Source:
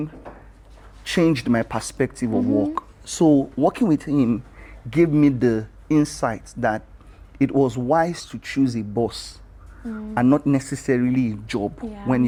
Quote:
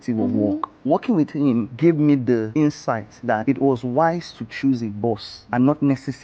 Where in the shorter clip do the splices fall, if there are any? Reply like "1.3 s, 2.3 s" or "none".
0.8 s, 1.7 s, 2.8 s, 5.4 s